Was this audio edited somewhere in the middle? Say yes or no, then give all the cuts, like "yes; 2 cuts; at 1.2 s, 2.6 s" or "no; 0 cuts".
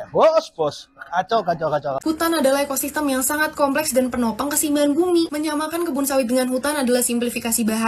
yes; 1 cut; at 2.0 s